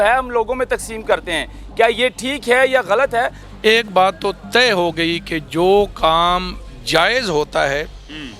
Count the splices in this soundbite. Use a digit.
1